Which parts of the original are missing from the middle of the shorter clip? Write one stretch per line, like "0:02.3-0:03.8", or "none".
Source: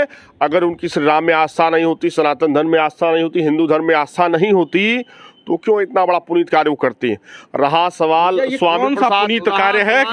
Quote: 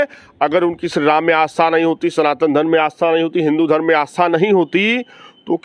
none